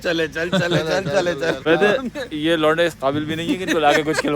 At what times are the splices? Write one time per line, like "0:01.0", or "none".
0:01.6